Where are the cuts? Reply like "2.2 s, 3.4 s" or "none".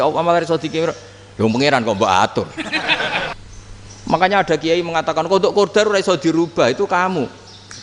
3.4 s